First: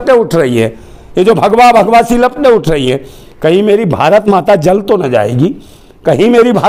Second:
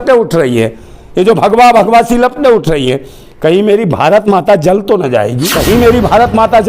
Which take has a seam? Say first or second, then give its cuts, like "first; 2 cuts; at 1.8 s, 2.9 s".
second; 1 cut; at 5.5 s